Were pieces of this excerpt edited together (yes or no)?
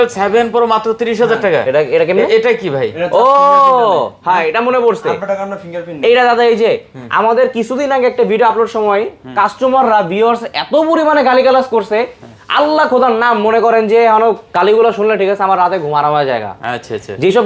no